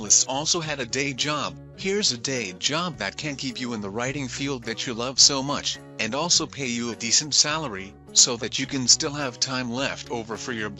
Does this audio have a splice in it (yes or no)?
no